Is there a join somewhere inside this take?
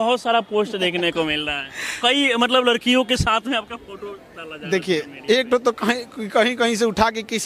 no; 0 cuts

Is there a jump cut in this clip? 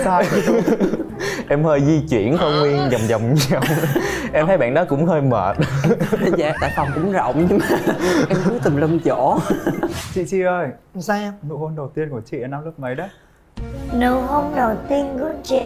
yes; 2 cuts; at 1.1 s, 10.0 s

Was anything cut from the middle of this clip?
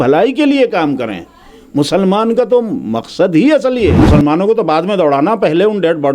yes; 1 cut; at 4.0 s

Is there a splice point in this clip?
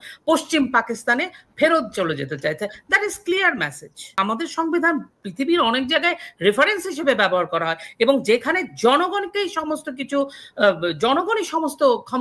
yes; 1 cut; at 4.2 s

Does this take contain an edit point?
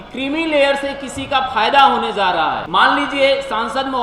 yes; 1 cut; at 2.6 s

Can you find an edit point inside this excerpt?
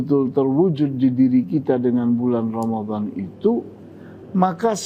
no; 0 cuts

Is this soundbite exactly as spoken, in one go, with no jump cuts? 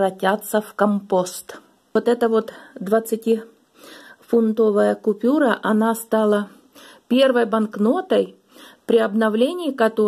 no; 1 cut; at 1.9 s

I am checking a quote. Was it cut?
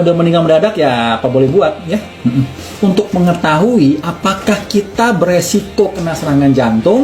yes; 2 cuts; at 2.7 s, 3.8 s

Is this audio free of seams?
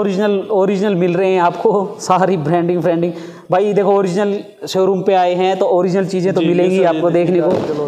yes; 0 cuts

